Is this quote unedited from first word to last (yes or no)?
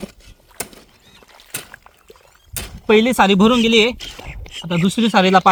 yes